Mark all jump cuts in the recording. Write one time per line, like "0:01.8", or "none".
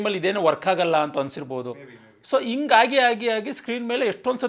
none